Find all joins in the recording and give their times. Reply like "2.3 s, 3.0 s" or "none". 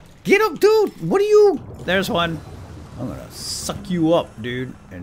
1.6 s